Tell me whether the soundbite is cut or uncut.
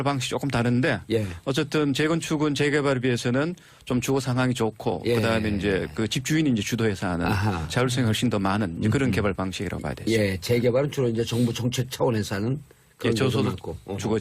cut